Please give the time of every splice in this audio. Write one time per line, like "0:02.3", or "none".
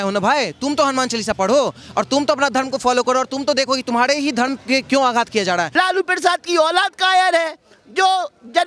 0:05.7